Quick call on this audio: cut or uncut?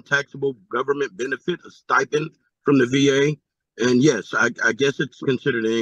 uncut